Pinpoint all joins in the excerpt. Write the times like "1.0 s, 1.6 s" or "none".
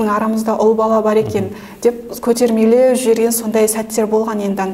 none